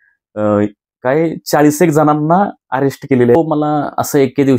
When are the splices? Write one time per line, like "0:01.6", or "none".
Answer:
0:03.4